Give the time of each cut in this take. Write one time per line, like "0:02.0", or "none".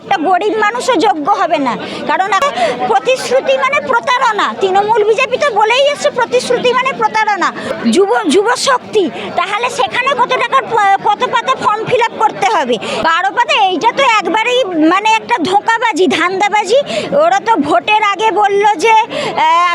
0:02.4
0:07.7
0:13.0